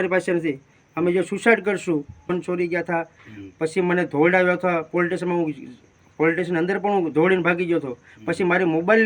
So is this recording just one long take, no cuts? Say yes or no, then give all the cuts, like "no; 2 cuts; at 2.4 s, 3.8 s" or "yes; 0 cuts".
no; 1 cut; at 2.3 s